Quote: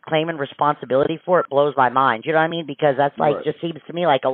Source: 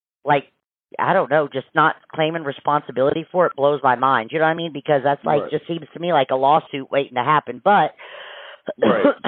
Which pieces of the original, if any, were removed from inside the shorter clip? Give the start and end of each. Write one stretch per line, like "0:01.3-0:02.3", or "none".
none